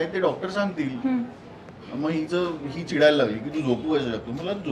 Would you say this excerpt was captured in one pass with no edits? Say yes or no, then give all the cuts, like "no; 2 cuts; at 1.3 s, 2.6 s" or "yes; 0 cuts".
yes; 0 cuts